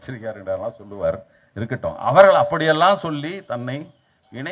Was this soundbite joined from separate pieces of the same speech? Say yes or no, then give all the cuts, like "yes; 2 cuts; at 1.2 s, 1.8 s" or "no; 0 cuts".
no; 0 cuts